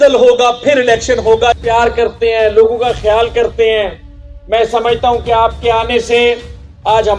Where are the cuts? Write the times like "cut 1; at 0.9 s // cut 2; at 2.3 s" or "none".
cut 1; at 1.6 s